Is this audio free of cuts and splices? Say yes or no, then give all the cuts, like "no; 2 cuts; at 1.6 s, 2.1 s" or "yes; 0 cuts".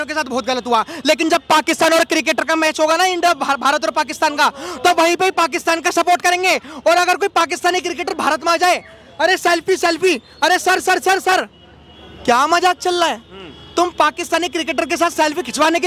yes; 0 cuts